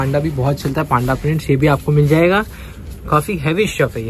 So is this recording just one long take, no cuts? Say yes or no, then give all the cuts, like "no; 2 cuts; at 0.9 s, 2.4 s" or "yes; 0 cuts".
yes; 0 cuts